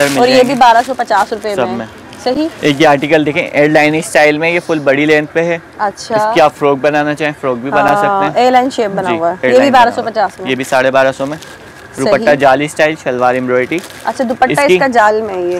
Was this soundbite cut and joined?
no; 0 cuts

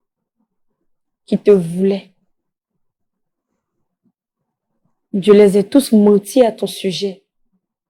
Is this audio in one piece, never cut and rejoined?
yes; 0 cuts

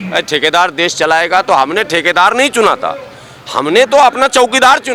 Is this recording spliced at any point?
no; 0 cuts

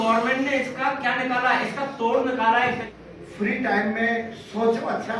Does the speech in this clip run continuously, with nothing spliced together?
no; 1 cut; at 2.9 s

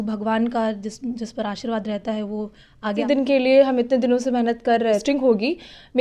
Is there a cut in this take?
yes; 2 cuts; at 3.0 s, 5.0 s

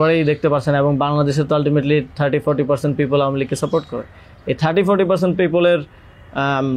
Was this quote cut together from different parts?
no; 0 cuts

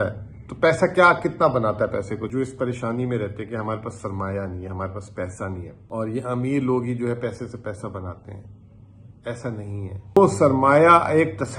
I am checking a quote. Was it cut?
yes; 3 cuts; at 2.2 s, 5.8 s, 10.2 s

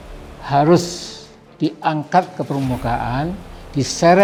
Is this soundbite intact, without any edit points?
yes; 0 cuts

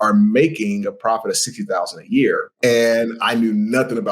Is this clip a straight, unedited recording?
no; 1 cut; at 2.5 s

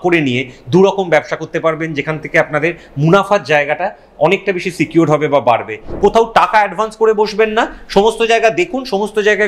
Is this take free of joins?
no; 1 cut; at 5.8 s

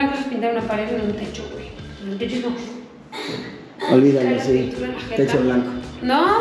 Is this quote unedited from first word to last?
yes; 0 cuts

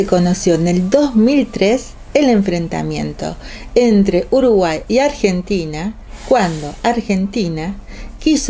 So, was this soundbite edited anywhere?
no; 0 cuts

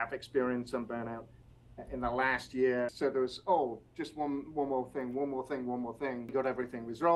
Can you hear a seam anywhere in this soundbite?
yes; 2 cuts; at 2.9 s, 6.3 s

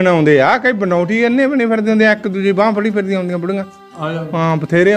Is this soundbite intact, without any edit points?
yes; 0 cuts

